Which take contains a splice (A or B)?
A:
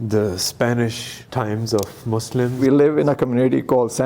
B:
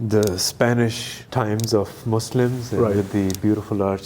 A